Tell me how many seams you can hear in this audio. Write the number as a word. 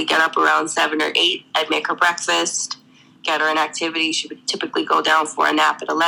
zero